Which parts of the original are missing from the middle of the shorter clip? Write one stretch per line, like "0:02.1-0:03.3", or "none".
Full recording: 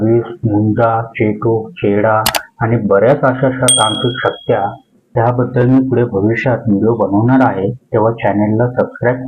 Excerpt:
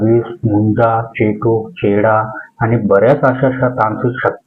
none